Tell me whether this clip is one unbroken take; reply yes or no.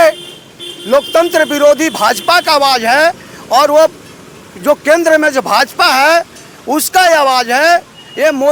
yes